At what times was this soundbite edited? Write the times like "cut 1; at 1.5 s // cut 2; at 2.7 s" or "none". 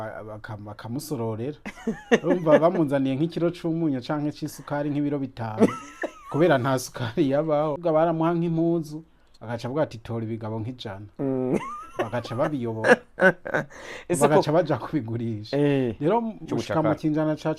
cut 1; at 7.8 s // cut 2; at 16.4 s